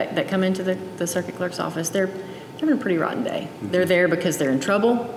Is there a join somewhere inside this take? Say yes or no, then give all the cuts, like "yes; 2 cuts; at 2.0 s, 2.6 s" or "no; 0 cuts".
no; 0 cuts